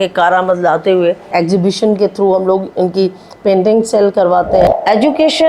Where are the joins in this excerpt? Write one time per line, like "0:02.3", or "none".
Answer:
0:01.3
0:04.7

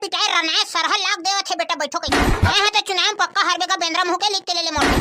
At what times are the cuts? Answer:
0:02.5

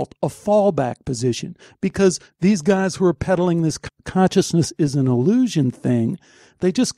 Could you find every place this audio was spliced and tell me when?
none

